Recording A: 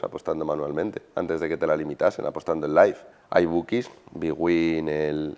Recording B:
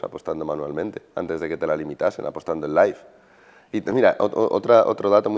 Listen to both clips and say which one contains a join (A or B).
A